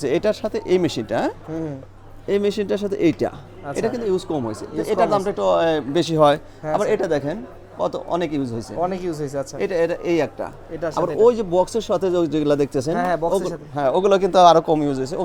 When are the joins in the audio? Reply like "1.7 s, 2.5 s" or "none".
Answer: none